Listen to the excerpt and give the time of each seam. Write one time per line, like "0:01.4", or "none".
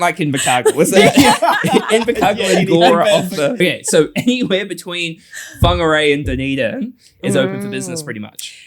0:03.6